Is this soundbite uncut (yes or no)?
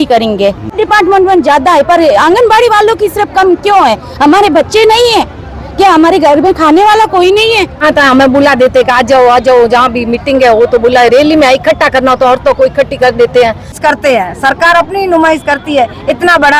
no